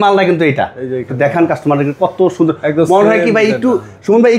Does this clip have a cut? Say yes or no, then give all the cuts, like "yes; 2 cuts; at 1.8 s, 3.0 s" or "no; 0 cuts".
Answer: no; 0 cuts